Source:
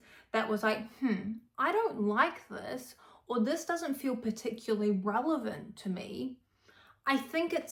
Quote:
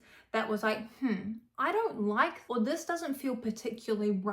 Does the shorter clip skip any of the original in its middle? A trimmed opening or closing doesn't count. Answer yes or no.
yes